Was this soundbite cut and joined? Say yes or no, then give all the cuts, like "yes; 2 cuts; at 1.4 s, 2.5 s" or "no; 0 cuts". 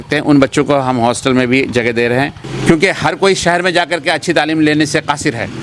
yes; 1 cut; at 2.4 s